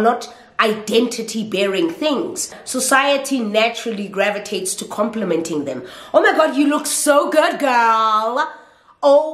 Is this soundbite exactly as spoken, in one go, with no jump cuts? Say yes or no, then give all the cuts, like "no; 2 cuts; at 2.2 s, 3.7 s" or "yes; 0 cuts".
no; 1 cut; at 2.6 s